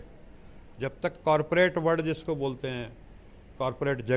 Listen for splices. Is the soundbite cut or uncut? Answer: uncut